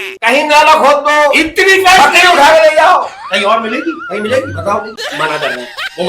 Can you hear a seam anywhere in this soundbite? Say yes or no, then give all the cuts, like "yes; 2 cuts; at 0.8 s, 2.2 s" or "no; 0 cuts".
yes; 1 cut; at 5.0 s